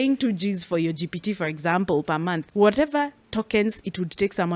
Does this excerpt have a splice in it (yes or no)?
yes